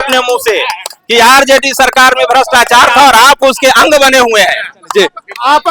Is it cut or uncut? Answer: uncut